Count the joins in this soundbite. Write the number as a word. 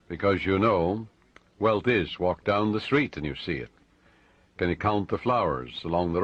zero